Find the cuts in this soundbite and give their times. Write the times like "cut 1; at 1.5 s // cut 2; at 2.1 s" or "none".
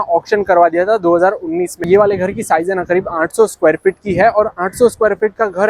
none